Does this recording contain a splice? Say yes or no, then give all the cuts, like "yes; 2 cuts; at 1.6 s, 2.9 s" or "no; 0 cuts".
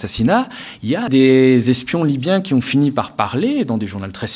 yes; 1 cut; at 1.1 s